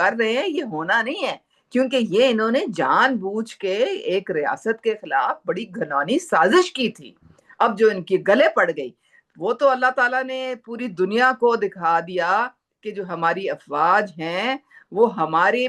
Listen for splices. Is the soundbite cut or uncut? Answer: uncut